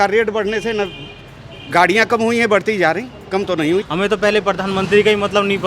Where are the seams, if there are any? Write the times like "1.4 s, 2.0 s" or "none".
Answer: 3.9 s